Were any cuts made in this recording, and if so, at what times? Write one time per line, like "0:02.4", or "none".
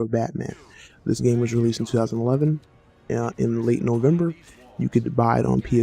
0:01.4